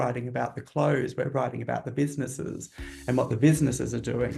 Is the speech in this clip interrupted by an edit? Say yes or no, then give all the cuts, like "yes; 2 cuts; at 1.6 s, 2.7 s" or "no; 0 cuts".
no; 0 cuts